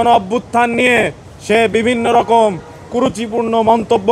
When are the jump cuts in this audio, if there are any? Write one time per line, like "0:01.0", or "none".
none